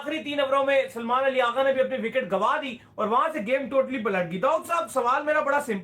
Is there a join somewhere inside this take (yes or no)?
no